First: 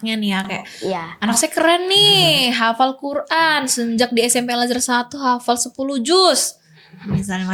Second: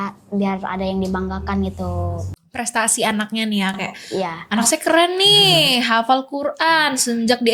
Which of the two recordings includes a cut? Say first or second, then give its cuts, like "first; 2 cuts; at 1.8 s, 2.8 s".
second; 1 cut; at 2.3 s